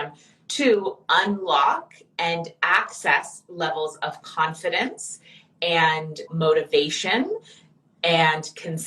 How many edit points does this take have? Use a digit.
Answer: 1